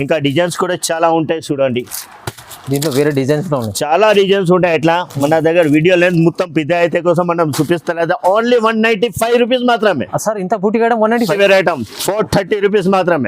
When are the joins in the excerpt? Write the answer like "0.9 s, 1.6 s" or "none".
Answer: 11.4 s